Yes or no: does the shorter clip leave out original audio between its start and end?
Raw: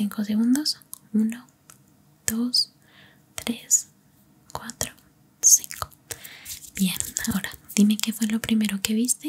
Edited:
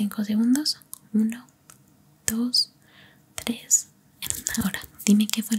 yes